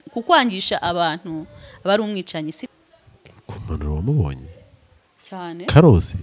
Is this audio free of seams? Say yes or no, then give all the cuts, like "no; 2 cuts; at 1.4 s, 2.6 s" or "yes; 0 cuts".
no; 1 cut; at 2.6 s